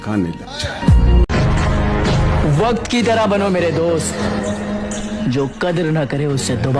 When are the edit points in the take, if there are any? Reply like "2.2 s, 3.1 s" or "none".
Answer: 1.3 s